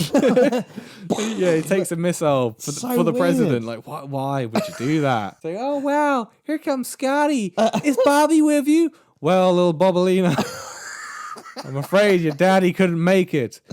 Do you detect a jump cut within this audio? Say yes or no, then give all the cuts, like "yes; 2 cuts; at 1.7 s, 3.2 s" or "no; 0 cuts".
yes; 1 cut; at 5.4 s